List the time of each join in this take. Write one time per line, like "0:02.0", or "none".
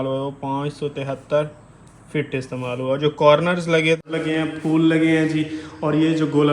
0:04.0